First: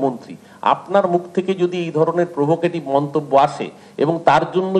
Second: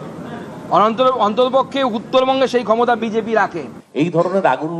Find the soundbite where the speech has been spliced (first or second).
second